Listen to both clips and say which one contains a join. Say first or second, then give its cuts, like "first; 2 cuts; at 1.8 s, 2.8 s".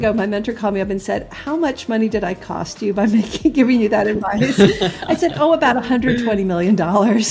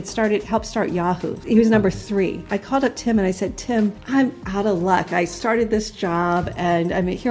second; 3 cuts; at 1.3 s, 2.5 s, 4.0 s